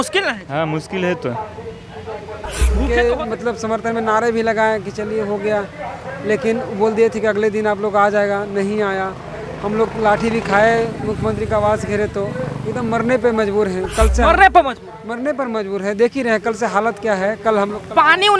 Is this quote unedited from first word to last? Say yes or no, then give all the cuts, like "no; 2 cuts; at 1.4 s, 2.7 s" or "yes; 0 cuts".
no; 1 cut; at 2.8 s